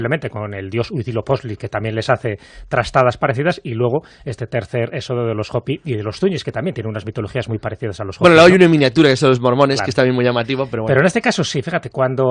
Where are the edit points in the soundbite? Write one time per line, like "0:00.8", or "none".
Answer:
none